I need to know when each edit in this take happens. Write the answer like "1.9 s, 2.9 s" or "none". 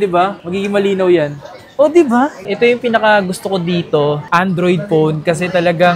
2.4 s